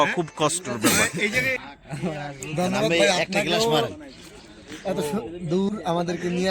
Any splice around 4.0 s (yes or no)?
no